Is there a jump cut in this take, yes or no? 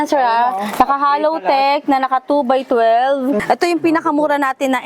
yes